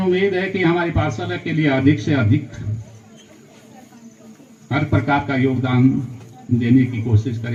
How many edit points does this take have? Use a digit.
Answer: 0